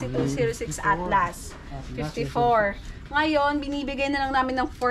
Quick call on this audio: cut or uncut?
uncut